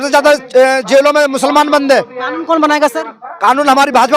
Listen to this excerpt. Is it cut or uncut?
uncut